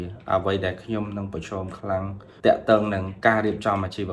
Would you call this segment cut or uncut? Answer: cut